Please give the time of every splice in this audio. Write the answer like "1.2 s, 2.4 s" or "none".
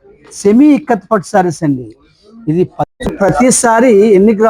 2.9 s